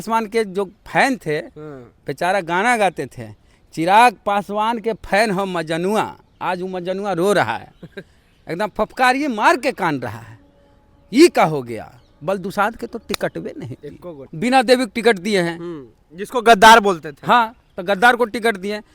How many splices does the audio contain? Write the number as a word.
one